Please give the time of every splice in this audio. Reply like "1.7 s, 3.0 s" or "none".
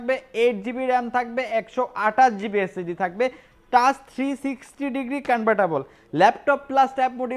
none